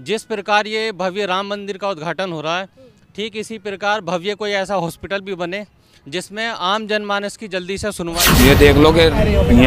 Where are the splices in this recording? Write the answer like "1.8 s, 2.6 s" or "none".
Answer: 8.2 s